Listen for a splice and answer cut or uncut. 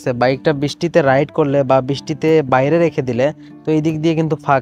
uncut